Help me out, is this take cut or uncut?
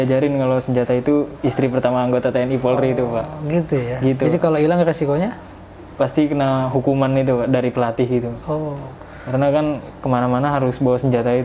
uncut